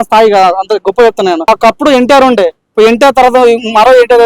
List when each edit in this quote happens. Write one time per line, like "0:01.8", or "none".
0:01.5